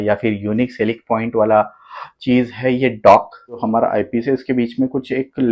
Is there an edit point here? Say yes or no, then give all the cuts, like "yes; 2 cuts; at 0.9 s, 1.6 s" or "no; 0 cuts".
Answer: yes; 1 cut; at 3.6 s